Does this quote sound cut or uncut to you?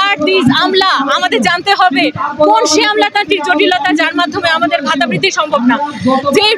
uncut